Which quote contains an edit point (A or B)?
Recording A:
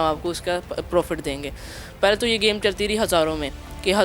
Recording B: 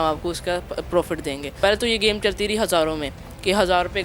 B